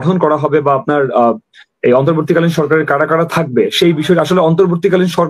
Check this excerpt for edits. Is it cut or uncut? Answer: uncut